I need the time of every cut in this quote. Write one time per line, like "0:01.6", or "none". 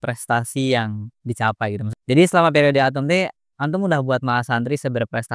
0:01.8